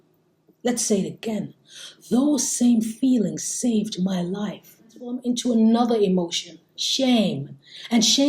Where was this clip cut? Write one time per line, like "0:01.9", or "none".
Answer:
0:05.2